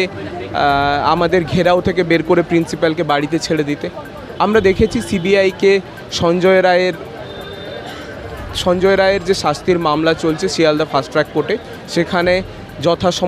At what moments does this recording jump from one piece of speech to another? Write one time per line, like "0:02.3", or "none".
none